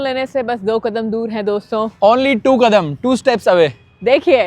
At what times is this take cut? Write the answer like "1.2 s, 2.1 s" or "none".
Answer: none